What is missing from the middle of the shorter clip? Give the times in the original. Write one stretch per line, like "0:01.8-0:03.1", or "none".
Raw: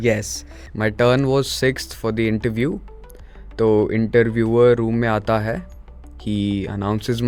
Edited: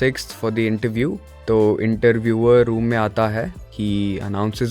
0:02.9-0:03.4
0:05.7-0:06.1